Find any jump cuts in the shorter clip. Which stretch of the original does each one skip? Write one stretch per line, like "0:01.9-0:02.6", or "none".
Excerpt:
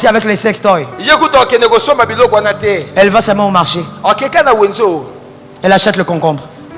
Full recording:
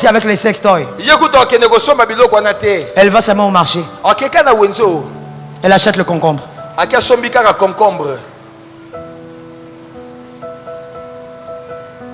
none